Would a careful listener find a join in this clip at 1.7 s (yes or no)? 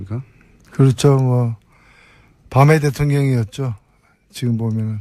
no